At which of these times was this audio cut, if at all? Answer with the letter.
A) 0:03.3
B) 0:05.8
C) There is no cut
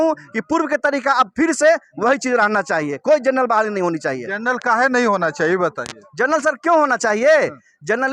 C